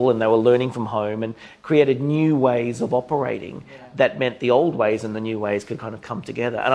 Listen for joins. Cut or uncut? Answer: uncut